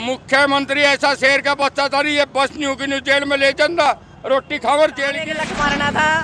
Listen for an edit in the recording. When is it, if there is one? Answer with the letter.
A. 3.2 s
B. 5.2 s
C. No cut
B